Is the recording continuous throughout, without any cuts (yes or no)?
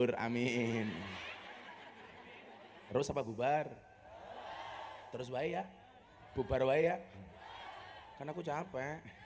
no